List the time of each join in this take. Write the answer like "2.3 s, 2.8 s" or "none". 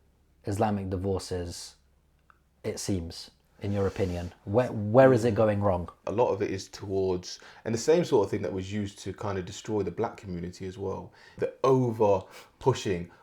6.0 s, 11.4 s